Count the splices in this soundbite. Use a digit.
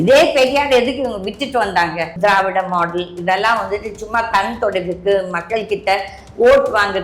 1